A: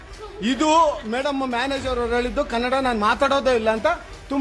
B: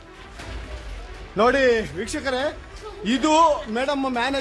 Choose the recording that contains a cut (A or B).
B